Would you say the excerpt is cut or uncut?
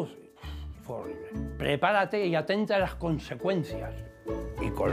cut